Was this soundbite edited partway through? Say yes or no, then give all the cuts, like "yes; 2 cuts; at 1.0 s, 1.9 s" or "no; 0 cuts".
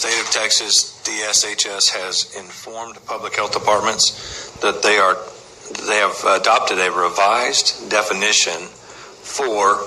no; 0 cuts